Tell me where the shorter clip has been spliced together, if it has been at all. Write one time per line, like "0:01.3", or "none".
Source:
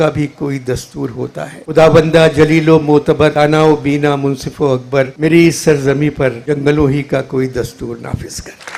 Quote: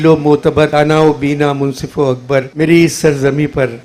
none